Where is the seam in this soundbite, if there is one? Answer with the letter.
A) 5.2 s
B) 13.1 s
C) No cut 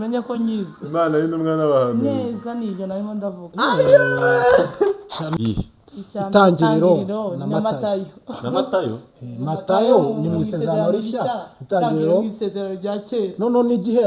A